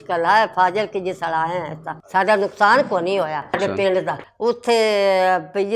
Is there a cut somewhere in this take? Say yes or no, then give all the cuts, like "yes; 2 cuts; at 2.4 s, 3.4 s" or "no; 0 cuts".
no; 0 cuts